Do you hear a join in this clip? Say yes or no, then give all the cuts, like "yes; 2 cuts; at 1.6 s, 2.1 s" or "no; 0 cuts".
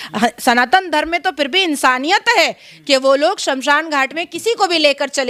no; 0 cuts